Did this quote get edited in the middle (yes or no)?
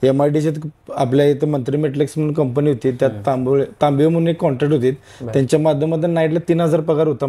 no